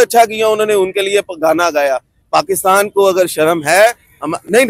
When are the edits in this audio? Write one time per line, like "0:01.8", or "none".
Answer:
none